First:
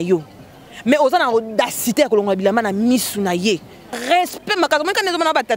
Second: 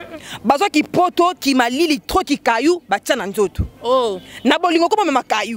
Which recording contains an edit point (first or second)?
first